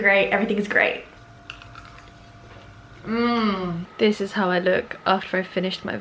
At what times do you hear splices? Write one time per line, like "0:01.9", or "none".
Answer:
0:01.1
0:03.8